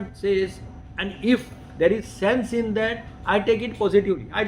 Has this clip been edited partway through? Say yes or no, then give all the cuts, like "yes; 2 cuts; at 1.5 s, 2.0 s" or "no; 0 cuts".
no; 0 cuts